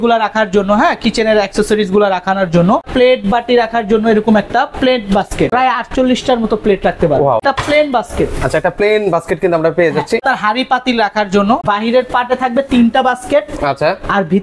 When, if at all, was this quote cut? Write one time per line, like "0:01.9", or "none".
0:02.9
0:05.5
0:07.4
0:10.2
0:11.6

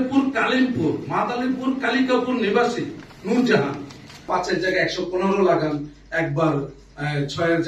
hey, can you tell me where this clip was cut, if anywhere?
0:04.3

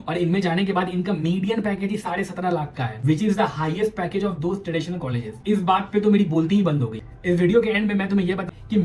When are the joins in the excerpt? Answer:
0:07.0

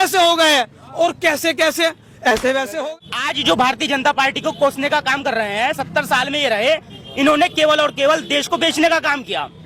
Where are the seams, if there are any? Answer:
0:02.8

